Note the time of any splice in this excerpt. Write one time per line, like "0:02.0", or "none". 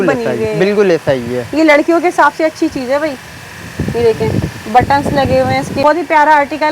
0:05.8